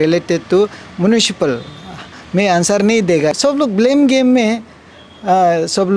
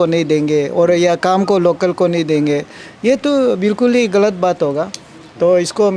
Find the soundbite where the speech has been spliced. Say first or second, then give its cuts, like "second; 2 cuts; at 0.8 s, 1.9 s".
first; 1 cut; at 3.3 s